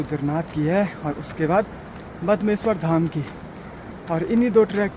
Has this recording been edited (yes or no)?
no